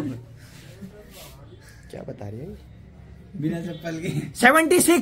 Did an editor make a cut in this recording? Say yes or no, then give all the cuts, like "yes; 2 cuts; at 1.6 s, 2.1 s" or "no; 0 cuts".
no; 0 cuts